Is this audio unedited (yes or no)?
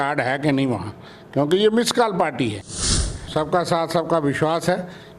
no